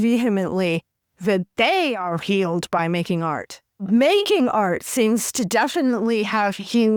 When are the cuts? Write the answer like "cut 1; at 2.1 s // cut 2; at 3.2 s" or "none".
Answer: none